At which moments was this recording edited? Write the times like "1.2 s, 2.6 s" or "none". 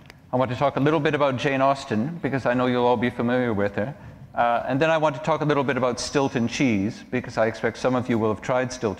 none